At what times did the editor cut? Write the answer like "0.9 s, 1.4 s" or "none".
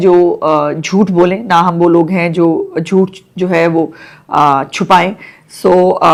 none